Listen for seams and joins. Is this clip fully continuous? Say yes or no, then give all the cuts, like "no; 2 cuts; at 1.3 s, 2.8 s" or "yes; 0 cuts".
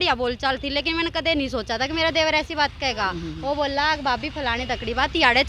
yes; 0 cuts